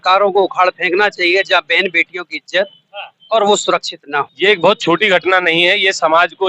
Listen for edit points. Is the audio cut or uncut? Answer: cut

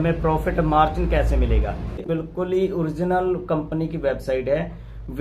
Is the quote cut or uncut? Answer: cut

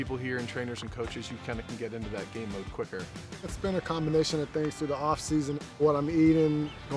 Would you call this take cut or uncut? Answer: cut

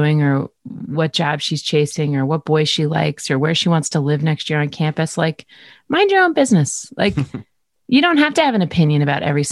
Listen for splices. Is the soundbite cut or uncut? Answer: uncut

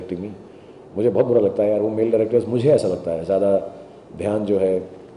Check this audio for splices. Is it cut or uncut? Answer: uncut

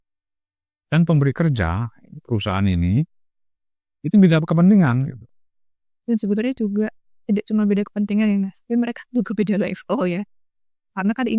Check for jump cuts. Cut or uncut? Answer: uncut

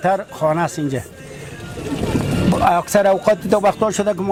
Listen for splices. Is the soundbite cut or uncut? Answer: uncut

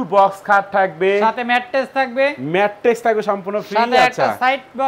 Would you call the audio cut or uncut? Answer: uncut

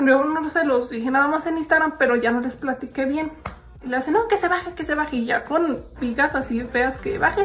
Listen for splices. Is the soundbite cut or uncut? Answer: cut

